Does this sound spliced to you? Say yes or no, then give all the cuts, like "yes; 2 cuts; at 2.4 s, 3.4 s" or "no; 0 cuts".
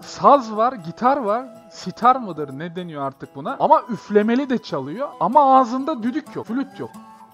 yes; 3 cuts; at 3.5 s, 5.1 s, 6.5 s